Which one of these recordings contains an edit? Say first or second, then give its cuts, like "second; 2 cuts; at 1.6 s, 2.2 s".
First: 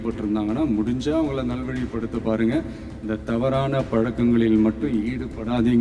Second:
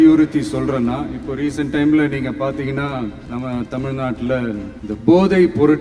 second; 2 cuts; at 3.2 s, 4.7 s